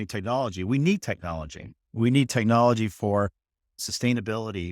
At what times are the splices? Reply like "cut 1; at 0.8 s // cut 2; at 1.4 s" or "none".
cut 1; at 3.4 s